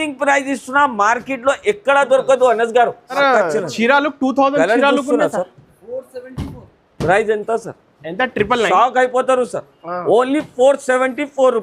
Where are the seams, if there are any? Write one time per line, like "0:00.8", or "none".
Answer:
0:03.2